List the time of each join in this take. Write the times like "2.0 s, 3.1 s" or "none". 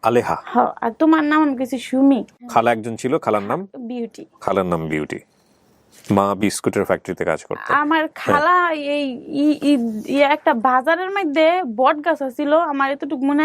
2.4 s